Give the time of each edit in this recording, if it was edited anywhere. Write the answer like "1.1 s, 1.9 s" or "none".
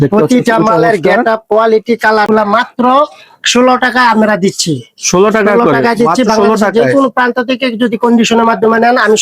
2.3 s